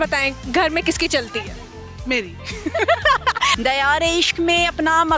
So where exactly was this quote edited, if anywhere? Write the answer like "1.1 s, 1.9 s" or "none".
3.5 s